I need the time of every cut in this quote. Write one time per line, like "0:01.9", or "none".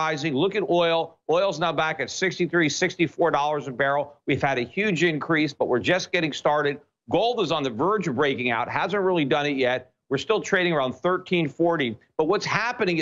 0:08.4